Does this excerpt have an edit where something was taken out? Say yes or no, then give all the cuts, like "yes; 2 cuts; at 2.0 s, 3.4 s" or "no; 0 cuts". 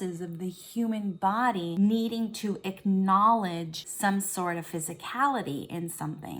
yes; 2 cuts; at 1.7 s, 3.8 s